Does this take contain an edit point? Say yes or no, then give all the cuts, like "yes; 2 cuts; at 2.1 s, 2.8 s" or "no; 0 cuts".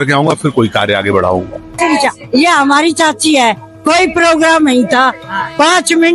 yes; 1 cut; at 1.7 s